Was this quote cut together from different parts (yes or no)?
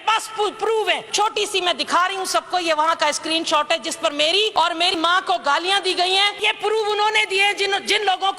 yes